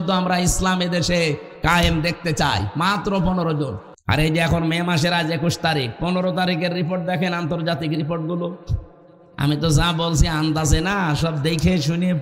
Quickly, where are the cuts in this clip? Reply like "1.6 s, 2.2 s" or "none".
3.9 s